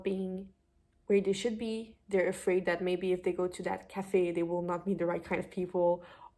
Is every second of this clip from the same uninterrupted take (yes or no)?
yes